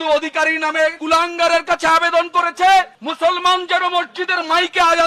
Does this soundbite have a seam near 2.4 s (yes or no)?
no